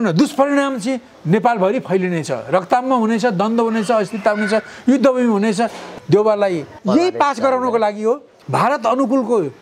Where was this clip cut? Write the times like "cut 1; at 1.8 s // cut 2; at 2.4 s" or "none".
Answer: cut 1; at 5.9 s // cut 2; at 6.7 s // cut 3; at 8.4 s